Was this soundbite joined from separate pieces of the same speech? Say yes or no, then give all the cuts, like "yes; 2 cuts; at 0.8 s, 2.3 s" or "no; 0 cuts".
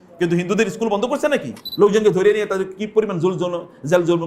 yes; 1 cut; at 1.6 s